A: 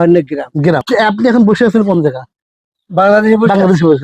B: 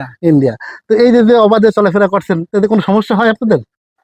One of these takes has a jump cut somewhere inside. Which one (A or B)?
A